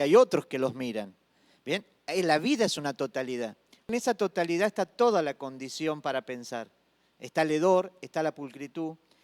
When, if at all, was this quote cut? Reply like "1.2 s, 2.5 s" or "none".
3.9 s